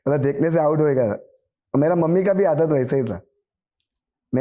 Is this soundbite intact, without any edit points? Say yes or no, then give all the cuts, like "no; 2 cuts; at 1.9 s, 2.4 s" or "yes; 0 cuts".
yes; 0 cuts